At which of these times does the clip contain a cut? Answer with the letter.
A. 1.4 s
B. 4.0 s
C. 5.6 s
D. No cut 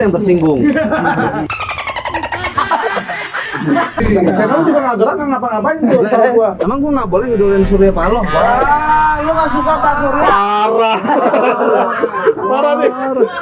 B